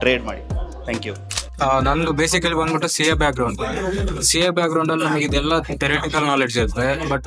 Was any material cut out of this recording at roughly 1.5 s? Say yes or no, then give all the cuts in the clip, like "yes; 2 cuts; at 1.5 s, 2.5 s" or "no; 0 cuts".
yes; 1 cut; at 1.5 s